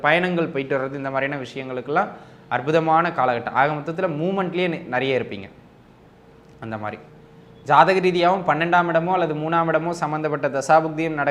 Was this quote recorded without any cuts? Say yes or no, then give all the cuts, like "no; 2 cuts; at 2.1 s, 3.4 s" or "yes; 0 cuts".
yes; 0 cuts